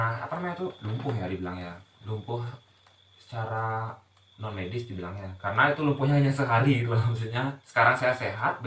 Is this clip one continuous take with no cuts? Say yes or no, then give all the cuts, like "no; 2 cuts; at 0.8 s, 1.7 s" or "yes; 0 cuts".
yes; 0 cuts